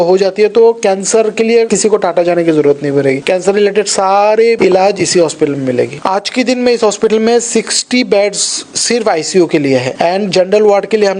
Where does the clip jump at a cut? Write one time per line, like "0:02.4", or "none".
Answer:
0:01.7
0:03.2
0:04.6
0:06.0
0:09.9